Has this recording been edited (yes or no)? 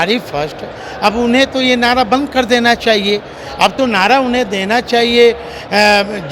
no